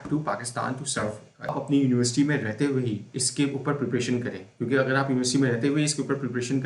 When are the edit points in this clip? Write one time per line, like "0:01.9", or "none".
0:01.5